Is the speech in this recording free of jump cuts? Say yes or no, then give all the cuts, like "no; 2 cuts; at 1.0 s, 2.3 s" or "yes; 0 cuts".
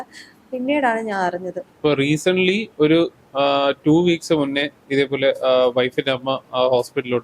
no; 1 cut; at 1.6 s